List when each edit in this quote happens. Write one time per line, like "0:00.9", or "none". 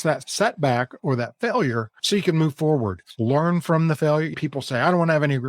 0:01.9
0:03.0
0:04.3